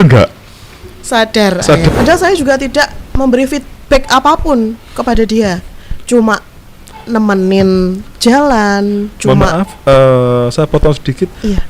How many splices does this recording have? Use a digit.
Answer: 1